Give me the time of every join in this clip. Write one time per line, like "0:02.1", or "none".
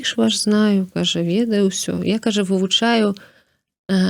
none